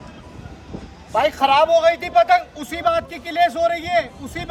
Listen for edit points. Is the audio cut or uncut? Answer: uncut